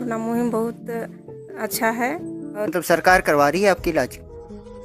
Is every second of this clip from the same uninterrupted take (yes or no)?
no